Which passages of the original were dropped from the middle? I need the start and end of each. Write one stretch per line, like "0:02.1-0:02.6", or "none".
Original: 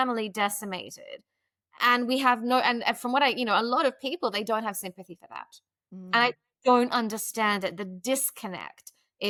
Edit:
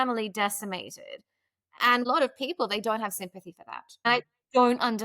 0:02.0-0:03.7
0:05.7-0:06.2